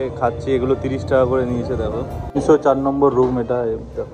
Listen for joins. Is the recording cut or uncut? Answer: cut